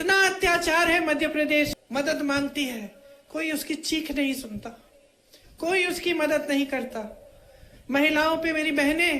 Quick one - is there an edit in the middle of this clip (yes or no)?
yes